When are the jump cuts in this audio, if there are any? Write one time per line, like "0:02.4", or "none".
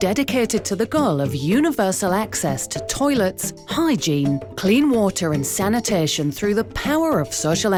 none